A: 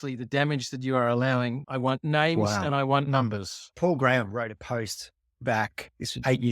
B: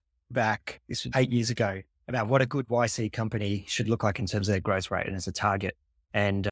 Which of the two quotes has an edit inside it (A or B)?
A